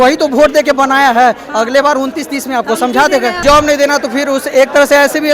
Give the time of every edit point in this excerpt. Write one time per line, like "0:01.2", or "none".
0:03.4

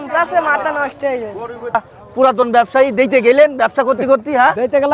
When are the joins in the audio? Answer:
0:01.7

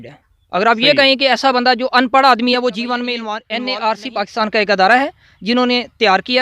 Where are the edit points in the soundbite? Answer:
0:03.4

